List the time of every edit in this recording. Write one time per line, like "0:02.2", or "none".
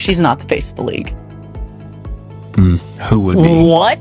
none